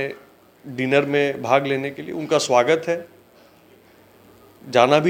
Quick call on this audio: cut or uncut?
uncut